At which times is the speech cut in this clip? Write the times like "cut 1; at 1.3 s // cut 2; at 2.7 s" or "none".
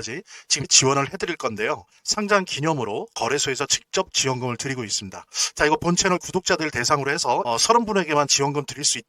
none